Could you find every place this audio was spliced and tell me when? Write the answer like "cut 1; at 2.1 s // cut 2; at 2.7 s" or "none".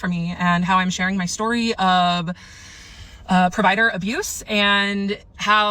cut 1; at 4.2 s